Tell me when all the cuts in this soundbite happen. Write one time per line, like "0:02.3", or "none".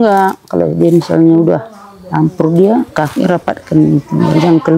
none